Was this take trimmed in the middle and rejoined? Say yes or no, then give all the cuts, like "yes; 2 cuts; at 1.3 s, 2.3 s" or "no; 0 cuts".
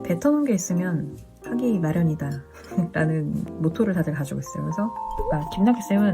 yes; 2 cuts; at 3.5 s, 5.1 s